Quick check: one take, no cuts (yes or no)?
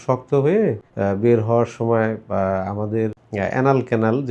no